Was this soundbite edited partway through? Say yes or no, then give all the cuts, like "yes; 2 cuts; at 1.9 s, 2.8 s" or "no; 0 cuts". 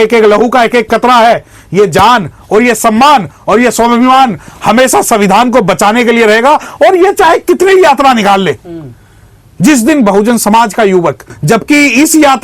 yes; 1 cut; at 11.3 s